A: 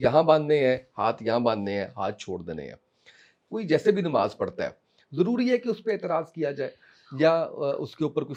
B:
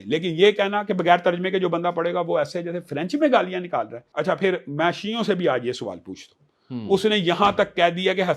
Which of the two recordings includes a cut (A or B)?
B